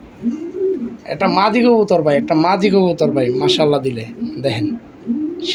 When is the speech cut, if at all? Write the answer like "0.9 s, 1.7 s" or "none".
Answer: none